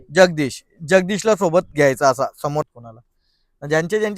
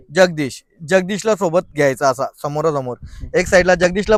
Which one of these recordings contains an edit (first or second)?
first